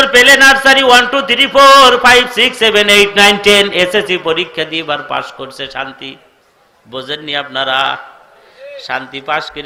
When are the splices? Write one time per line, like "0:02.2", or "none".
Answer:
none